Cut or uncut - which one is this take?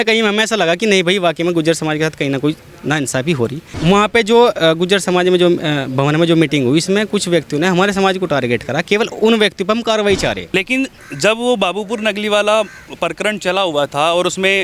cut